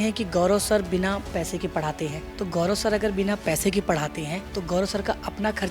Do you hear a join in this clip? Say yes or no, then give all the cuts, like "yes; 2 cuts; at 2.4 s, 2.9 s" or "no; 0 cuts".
yes; 2 cuts; at 2.2 s, 4.4 s